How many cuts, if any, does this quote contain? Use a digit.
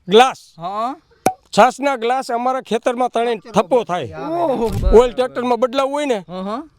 1